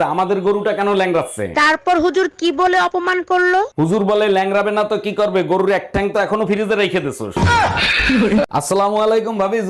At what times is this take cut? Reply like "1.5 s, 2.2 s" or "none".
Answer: 8.5 s

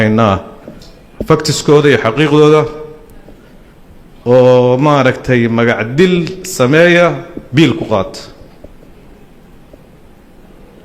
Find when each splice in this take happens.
none

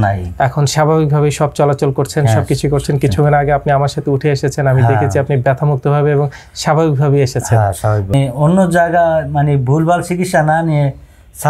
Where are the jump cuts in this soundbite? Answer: 8.1 s

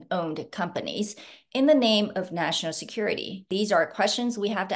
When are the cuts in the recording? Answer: 3.5 s

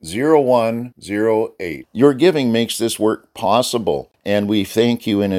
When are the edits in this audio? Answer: 4.1 s

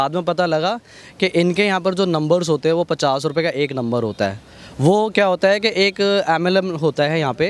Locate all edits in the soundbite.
none

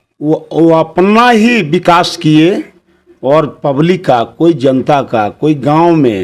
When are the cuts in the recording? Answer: none

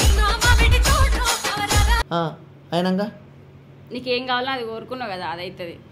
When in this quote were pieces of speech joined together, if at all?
none

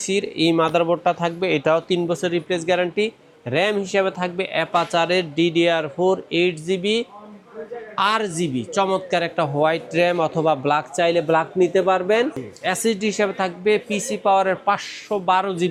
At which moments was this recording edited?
none

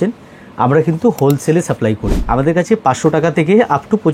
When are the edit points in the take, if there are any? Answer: 2.1 s

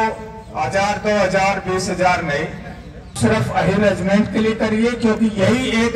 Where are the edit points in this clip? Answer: 3.1 s

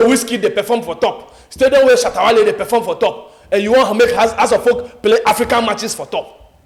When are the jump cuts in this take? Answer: none

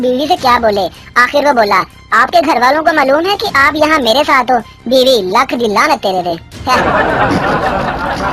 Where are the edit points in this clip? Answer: 6.8 s

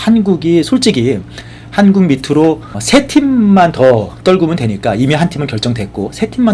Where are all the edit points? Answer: 2.7 s

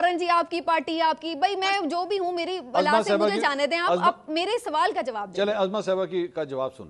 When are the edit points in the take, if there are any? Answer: none

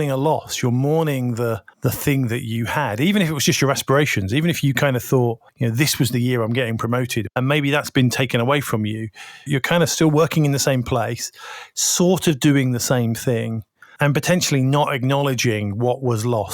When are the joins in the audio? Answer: 1.7 s, 5.5 s, 7.3 s, 9.5 s, 13.9 s

